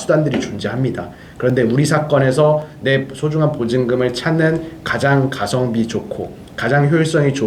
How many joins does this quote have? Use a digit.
0